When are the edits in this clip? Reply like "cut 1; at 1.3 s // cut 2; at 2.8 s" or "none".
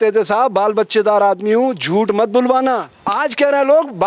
cut 1; at 3.0 s